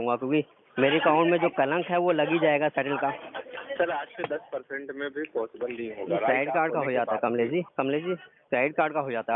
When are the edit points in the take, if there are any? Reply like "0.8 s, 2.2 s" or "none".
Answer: 7.7 s